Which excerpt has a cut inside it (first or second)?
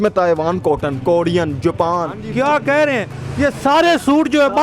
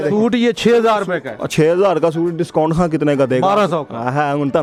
first